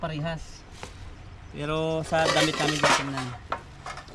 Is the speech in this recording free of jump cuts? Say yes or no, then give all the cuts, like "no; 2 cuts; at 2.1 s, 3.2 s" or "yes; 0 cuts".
yes; 0 cuts